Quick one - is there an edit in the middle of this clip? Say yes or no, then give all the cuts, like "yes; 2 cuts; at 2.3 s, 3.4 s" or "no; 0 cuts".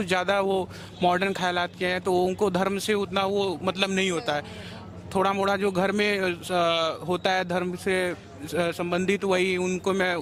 no; 0 cuts